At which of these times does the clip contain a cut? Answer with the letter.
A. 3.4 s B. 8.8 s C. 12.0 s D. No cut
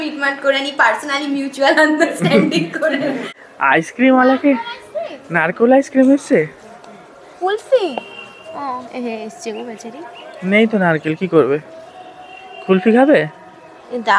A